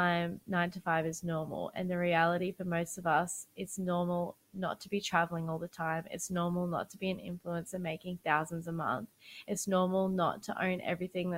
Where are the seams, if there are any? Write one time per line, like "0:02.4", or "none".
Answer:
none